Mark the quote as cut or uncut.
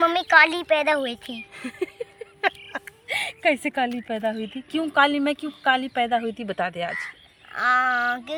uncut